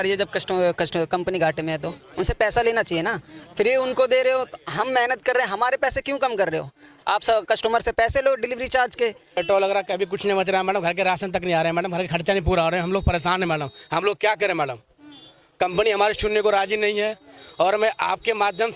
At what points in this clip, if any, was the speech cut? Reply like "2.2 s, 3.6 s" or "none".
9.4 s